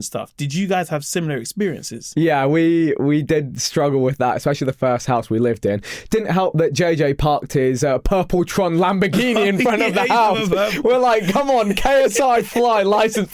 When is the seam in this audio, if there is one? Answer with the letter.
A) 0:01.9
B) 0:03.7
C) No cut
A